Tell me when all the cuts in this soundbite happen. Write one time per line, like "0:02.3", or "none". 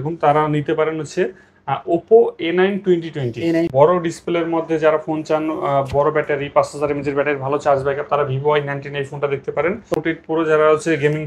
0:03.7
0:09.9